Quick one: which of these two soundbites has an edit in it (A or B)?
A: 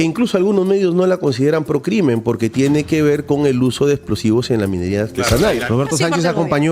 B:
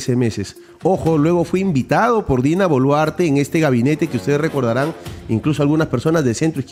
A